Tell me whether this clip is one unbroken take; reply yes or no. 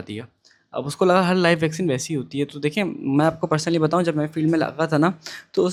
yes